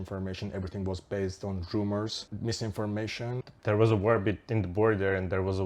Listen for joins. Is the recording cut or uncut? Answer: cut